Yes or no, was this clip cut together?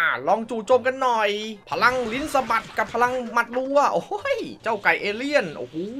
yes